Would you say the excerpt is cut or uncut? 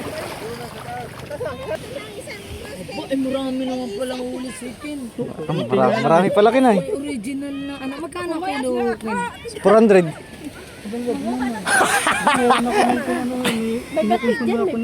cut